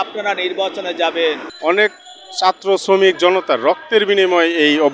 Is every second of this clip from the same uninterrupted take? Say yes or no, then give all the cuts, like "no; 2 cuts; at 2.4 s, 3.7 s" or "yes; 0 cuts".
no; 1 cut; at 1.5 s